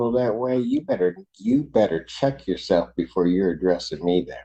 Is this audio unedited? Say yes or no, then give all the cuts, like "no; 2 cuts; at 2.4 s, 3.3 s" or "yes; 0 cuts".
yes; 0 cuts